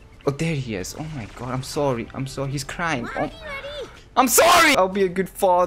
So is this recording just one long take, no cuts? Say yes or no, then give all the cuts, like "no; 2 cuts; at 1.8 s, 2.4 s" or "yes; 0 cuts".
no; 1 cut; at 4.7 s